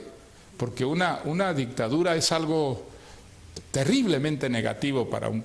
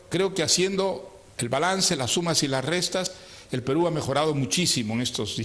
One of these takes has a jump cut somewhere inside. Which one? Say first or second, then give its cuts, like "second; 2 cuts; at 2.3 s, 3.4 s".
second; 1 cut; at 4.5 s